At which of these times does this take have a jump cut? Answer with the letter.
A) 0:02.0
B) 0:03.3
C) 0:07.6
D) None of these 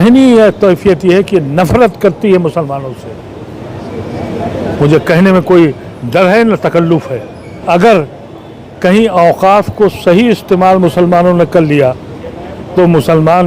C